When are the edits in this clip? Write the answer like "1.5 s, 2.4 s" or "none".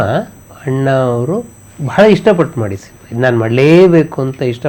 none